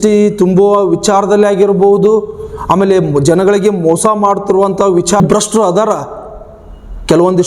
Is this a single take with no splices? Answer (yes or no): no